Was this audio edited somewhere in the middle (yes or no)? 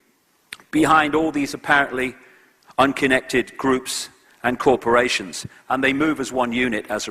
yes